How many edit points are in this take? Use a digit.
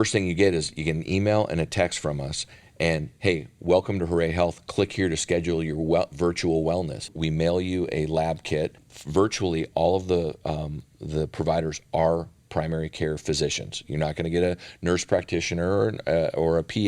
2